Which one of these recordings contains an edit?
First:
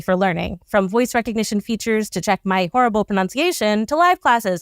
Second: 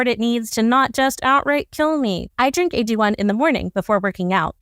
second; 1 cut; at 2.2 s

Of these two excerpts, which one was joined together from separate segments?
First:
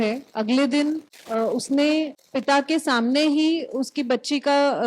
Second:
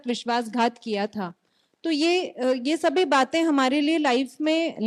first; 2 cuts; at 1.1 s, 2.2 s

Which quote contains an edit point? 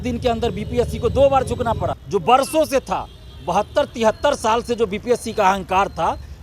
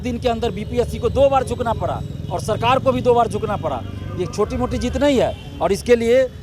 first; 1 cut; at 1.9 s

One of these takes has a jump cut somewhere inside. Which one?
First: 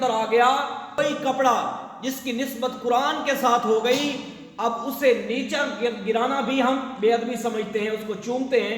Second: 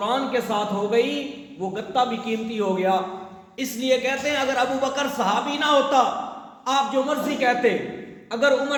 first; 1 cut; at 1.0 s

